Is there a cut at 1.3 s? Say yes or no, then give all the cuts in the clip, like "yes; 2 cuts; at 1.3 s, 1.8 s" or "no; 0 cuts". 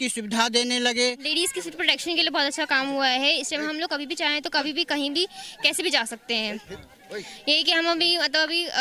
yes; 1 cut; at 1.3 s